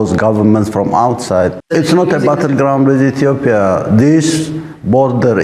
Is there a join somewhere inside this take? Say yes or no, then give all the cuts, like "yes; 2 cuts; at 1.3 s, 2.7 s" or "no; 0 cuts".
yes; 1 cut; at 1.6 s